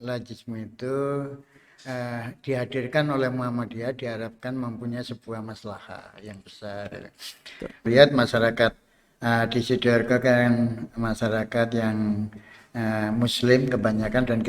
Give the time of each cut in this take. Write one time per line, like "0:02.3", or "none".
0:07.8